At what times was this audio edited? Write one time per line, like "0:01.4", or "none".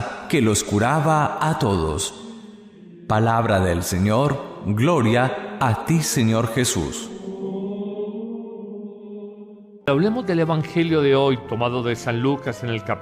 0:10.5